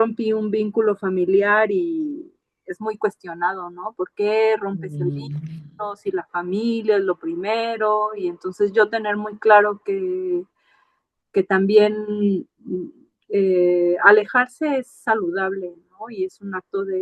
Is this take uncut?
yes; 0 cuts

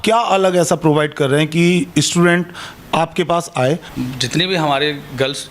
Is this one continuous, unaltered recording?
no; 1 cut; at 3.9 s

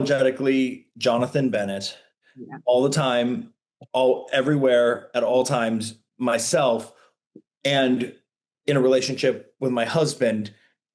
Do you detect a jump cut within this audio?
no; 0 cuts

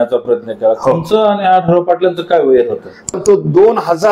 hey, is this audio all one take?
no; 1 cut; at 3.2 s

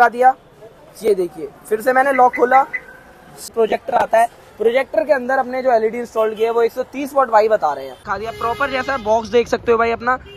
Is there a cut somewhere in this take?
yes; 2 cuts; at 3.5 s, 8.0 s

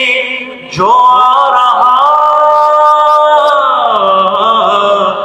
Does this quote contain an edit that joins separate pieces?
no; 0 cuts

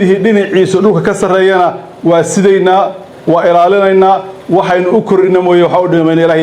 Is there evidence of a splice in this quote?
no; 0 cuts

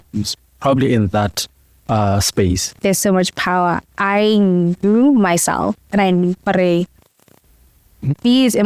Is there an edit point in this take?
yes; 1 cut; at 2.8 s

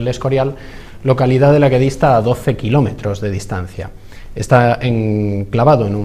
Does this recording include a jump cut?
no; 0 cuts

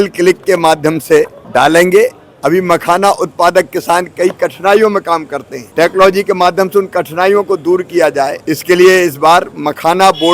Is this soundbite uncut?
no; 2 cuts; at 1.4 s, 2.4 s

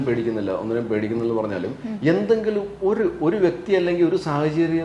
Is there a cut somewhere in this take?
no; 0 cuts

